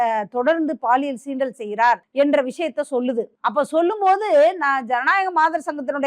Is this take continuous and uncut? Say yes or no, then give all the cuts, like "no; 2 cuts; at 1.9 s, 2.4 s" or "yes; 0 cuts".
no; 2 cuts; at 2.1 s, 3.3 s